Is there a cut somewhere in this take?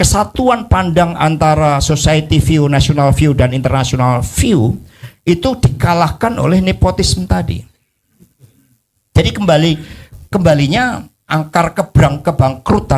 no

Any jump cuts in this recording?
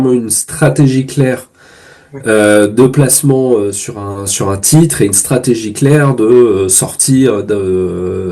no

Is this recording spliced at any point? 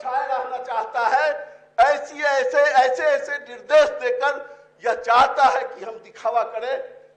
no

